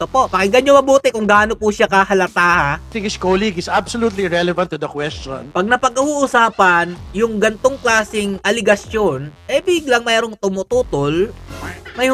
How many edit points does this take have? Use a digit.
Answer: 1